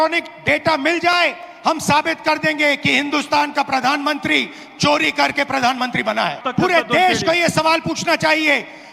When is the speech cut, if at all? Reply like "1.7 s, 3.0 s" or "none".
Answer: none

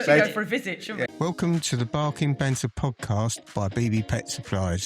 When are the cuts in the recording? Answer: 1.1 s

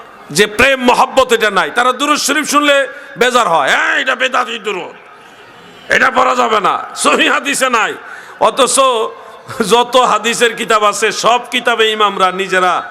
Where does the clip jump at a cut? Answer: none

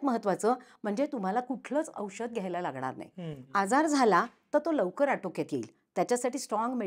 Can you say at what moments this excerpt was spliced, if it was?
none

